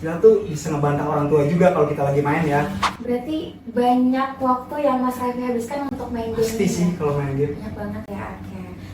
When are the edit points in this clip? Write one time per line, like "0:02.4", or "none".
0:02.9